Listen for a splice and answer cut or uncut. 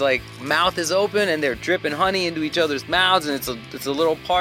uncut